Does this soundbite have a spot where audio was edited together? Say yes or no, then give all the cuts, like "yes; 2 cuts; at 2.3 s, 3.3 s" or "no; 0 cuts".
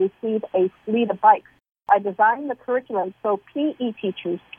yes; 1 cut; at 1.8 s